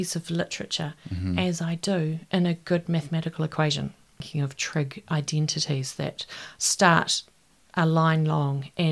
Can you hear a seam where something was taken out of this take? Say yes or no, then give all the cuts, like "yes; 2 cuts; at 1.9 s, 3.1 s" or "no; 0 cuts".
yes; 1 cut; at 4.2 s